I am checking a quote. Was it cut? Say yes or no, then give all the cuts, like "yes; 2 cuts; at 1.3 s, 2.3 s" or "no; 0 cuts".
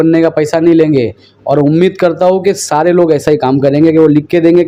no; 0 cuts